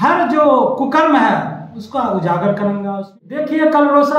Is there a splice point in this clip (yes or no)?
yes